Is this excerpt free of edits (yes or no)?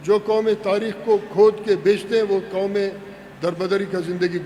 yes